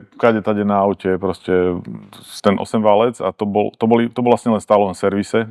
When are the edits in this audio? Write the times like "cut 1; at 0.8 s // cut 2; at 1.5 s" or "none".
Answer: cut 1; at 2.3 s